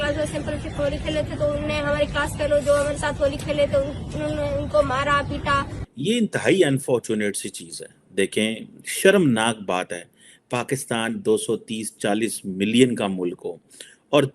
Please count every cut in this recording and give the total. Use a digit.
1